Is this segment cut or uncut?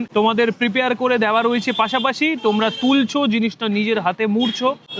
uncut